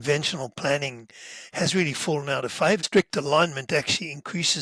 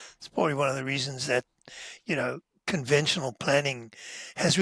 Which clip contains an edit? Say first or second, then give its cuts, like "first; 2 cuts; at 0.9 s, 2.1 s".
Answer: first; 1 cut; at 2.9 s